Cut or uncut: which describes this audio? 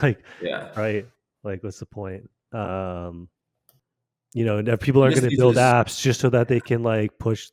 uncut